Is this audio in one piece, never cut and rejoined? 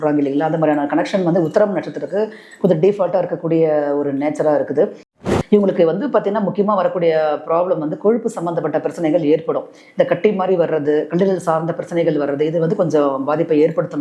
no; 1 cut; at 5.2 s

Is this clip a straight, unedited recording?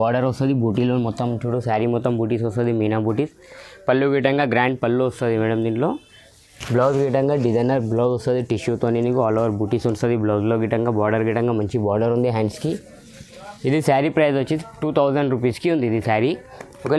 yes; 0 cuts

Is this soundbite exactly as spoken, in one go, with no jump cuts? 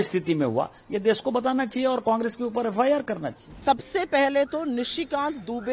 no; 1 cut; at 3.6 s

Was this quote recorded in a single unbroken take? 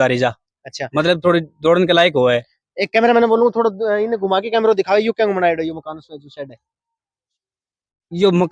yes; 0 cuts

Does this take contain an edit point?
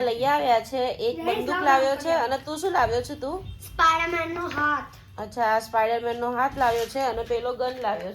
no; 0 cuts

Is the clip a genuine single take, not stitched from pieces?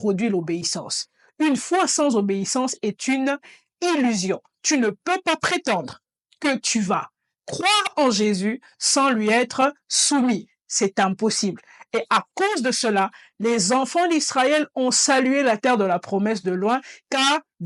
yes; 0 cuts

